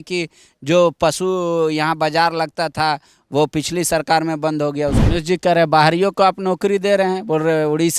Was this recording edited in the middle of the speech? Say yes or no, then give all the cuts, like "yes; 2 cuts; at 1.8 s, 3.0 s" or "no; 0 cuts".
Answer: yes; 1 cut; at 5.0 s